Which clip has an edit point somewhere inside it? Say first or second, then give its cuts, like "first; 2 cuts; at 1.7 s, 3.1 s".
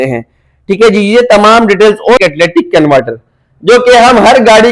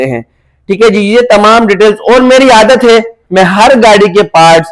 first; 1 cut; at 2.2 s